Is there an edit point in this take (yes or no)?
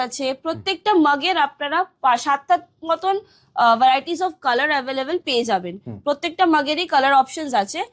no